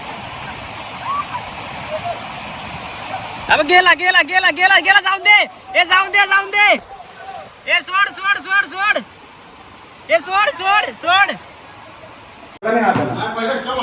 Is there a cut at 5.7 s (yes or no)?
no